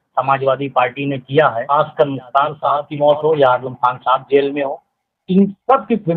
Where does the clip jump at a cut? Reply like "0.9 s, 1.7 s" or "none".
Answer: 1.6 s, 2.8 s